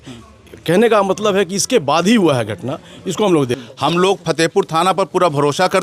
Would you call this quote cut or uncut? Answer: cut